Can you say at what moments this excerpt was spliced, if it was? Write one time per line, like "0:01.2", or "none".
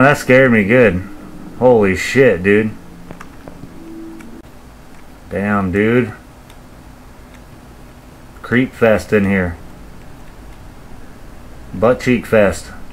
0:04.4